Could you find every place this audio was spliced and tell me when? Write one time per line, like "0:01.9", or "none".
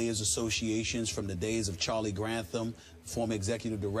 none